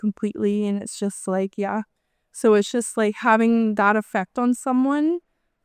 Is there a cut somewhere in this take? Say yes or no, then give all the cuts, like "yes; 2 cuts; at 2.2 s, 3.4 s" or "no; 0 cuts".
no; 0 cuts